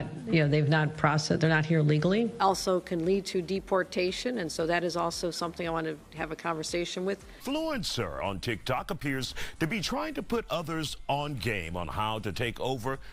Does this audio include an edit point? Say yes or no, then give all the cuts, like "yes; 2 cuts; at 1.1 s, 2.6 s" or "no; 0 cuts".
yes; 2 cuts; at 2.3 s, 7.3 s